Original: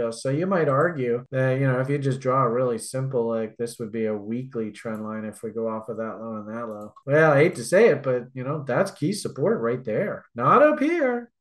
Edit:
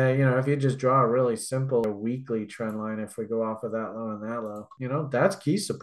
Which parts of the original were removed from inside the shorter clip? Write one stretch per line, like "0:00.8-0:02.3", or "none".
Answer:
0:03.3-0:04.1
0:07.0-0:08.3